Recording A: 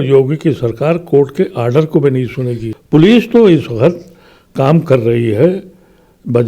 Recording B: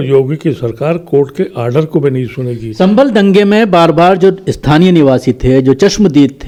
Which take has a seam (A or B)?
A